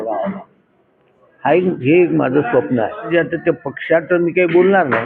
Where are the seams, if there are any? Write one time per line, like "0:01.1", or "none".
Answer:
0:03.1